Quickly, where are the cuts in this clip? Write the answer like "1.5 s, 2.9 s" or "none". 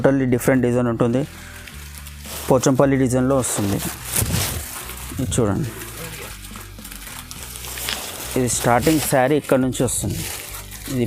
none